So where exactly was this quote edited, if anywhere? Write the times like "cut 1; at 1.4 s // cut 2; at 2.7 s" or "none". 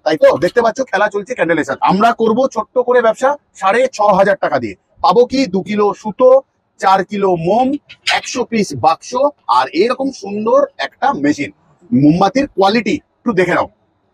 cut 1; at 1.7 s